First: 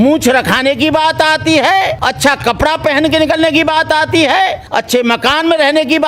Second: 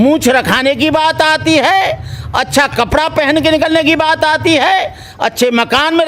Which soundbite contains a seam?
first; 2 cuts; at 2.0 s, 4.6 s

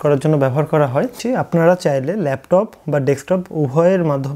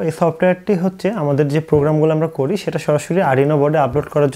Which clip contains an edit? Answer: first; 1 cut; at 1.2 s

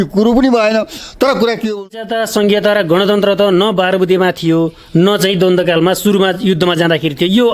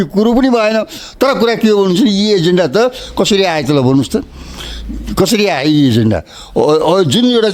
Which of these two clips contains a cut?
first; 1 cut; at 1.9 s

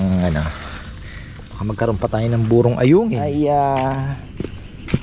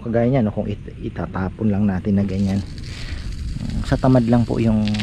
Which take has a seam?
first; 1 cut; at 3.2 s

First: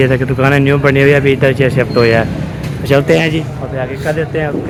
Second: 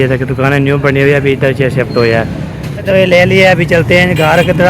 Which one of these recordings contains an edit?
second; 1 cut; at 2.8 s

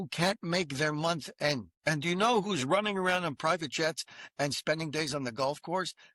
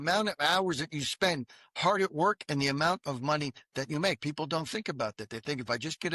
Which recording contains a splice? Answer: first; 1 cut; at 1.7 s

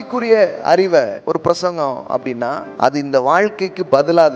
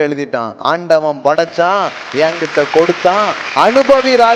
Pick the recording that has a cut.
first; 2 cuts; at 1.2 s, 2.7 s

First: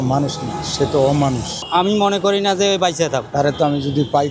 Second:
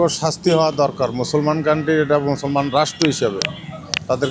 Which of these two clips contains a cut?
first; 2 cuts; at 1.5 s, 3.3 s

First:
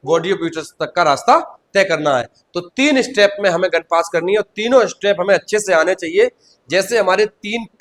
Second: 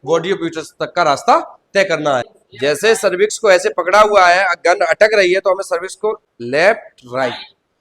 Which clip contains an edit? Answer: second; 2 cuts; at 2.4 s, 6.3 s

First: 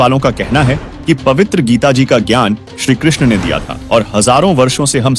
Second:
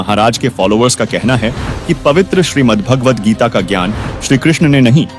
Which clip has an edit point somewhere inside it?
first; 1 cut; at 3.7 s

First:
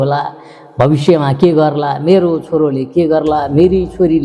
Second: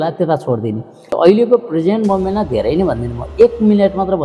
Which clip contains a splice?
second; 1 cut; at 1.1 s

